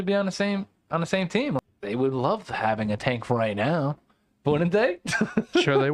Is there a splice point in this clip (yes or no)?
yes